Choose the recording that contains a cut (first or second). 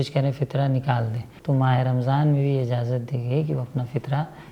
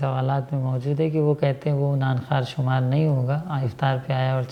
first